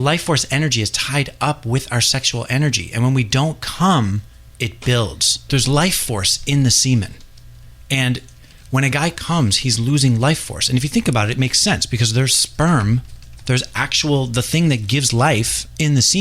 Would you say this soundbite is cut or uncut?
cut